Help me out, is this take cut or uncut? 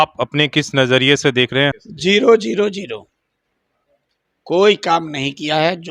cut